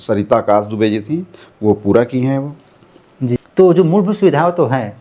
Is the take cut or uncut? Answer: cut